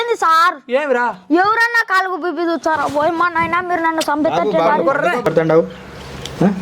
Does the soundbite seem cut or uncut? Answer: cut